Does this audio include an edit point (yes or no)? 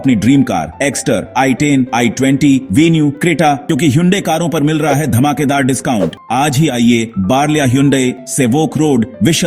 yes